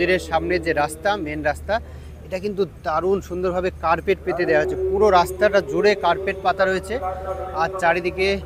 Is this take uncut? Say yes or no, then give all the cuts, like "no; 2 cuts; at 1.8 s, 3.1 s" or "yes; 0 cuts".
yes; 0 cuts